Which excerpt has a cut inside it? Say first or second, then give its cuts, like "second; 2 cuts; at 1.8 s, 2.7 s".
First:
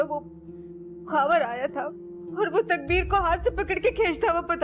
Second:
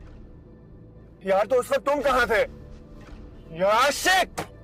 first; 1 cut; at 2.8 s